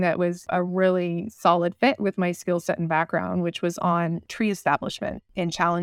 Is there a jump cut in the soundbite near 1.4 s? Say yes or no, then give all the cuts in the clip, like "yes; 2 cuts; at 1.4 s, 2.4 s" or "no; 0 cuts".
no; 1 cut; at 4.3 s